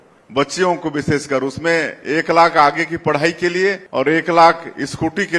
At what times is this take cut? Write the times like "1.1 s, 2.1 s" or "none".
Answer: 3.8 s